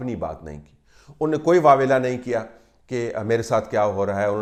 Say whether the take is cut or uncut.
uncut